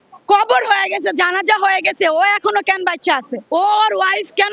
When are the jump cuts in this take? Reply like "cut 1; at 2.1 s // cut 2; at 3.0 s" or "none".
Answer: cut 1; at 3.3 s